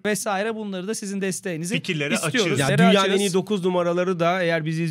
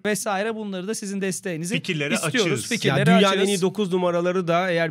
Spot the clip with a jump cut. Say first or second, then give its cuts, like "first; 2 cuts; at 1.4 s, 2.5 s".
first; 1 cut; at 2.6 s